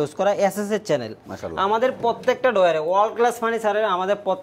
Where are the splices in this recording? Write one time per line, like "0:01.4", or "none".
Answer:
none